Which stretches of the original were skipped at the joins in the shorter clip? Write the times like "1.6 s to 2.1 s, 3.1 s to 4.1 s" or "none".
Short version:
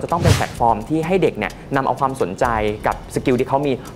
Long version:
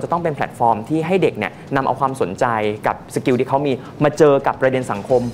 none